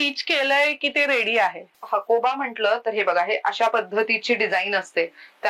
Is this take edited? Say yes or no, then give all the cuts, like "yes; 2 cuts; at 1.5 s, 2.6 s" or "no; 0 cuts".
yes; 1 cut; at 1.7 s